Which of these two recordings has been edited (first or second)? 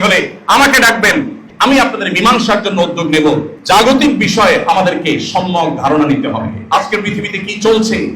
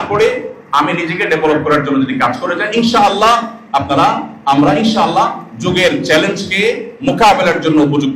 first